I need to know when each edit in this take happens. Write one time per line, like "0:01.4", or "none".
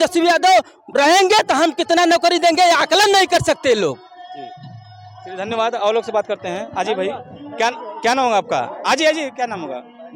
none